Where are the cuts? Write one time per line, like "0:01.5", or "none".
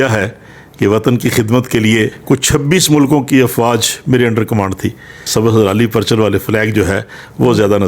0:02.2
0:05.2